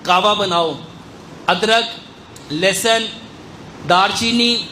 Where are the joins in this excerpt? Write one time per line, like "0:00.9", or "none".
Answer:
none